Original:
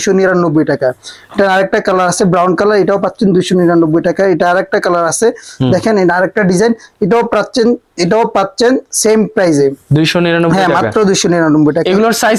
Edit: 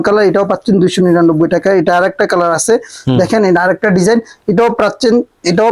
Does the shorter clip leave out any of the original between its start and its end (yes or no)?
no